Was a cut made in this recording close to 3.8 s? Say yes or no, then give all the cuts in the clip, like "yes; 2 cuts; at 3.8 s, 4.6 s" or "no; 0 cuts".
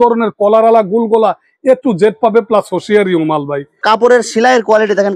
yes; 1 cut; at 3.8 s